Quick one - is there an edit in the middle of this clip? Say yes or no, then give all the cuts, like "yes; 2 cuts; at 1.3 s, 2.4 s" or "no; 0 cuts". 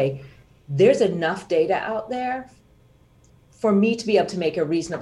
no; 0 cuts